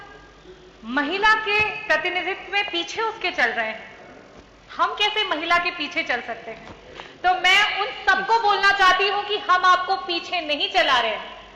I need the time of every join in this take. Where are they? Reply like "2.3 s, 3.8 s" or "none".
none